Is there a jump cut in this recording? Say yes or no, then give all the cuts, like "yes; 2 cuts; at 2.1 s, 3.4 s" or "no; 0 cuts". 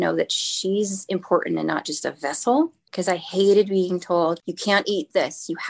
yes; 2 cuts; at 2.9 s, 4.5 s